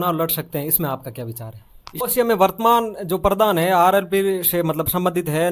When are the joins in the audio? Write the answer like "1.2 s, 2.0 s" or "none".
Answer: 2.0 s